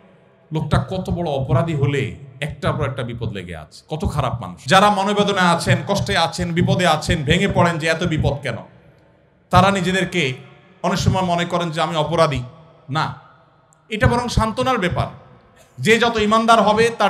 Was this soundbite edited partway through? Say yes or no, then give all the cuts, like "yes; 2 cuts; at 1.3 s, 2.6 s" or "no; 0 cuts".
yes; 1 cut; at 4.5 s